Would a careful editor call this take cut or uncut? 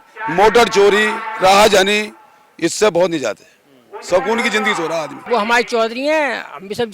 cut